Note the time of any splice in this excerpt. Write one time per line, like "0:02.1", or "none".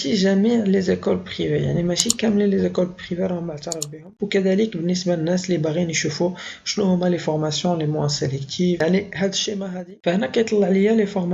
0:04.2
0:09.5